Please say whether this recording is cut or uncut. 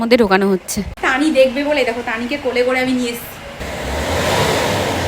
cut